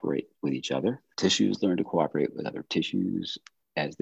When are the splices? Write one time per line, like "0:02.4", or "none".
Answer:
0:01.1

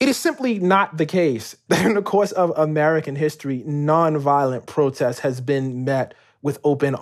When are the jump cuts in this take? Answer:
0:01.5

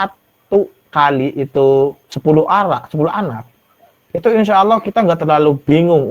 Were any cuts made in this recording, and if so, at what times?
0:02.1

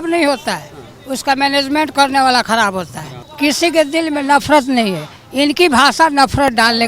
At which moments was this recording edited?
0:03.2

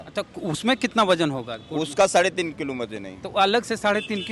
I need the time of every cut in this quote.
none

